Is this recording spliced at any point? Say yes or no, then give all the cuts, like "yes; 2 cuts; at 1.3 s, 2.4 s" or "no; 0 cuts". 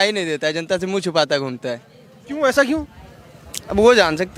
no; 0 cuts